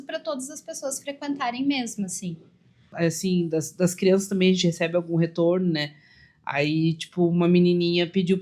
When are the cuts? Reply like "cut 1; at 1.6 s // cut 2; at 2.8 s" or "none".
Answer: cut 1; at 2.9 s